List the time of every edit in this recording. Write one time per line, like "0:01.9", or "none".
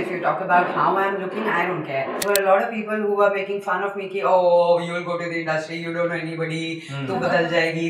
0:02.2